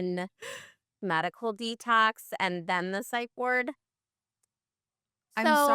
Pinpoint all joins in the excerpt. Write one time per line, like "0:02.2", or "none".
0:01.0